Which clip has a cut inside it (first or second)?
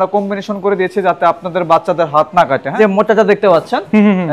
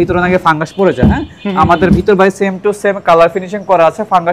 first